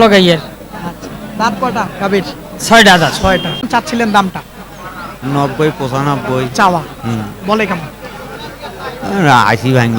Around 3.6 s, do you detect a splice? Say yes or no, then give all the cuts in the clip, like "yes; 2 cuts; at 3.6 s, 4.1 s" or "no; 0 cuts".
yes; 1 cut; at 3.6 s